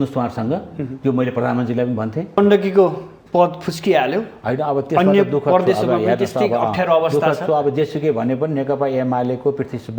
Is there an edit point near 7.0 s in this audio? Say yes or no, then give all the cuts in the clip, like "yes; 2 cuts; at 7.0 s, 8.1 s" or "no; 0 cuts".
no; 1 cut; at 2.4 s